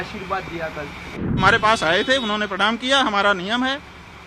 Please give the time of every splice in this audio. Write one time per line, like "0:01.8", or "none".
0:01.4